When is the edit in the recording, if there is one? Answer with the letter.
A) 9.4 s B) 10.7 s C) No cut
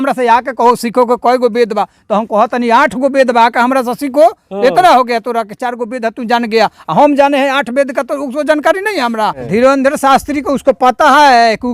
A